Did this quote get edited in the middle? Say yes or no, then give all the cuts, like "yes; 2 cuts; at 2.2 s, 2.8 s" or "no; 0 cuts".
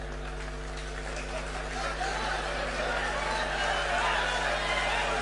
no; 0 cuts